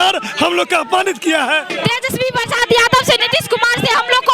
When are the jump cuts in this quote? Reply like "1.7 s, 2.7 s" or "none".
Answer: 1.7 s, 3.2 s